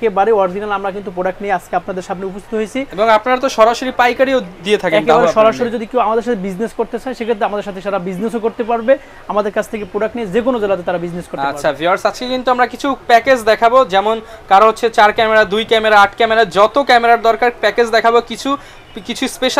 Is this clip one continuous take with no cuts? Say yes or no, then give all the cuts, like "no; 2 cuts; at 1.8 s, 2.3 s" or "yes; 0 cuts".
yes; 0 cuts